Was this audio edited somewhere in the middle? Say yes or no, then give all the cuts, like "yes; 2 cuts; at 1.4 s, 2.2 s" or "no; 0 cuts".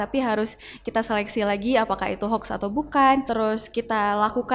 yes; 1 cut; at 3.3 s